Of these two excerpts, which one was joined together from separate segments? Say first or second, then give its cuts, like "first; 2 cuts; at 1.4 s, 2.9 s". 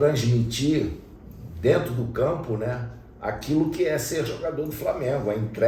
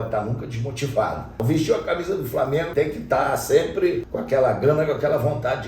second; 3 cuts; at 1.4 s, 2.7 s, 4.1 s